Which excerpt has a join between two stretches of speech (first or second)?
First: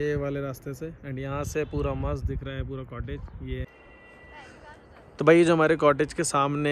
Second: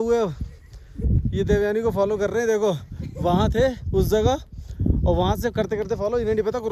first